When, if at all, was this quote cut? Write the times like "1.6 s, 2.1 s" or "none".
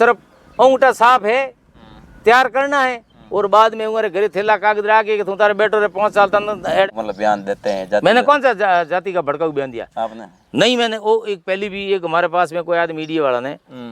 6.9 s